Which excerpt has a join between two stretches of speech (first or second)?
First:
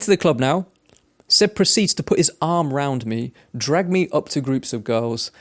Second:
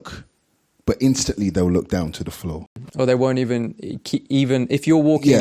second